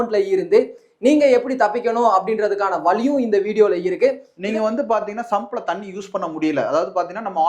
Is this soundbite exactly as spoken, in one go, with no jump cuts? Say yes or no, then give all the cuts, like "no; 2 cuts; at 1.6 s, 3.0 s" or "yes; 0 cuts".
no; 1 cut; at 4.3 s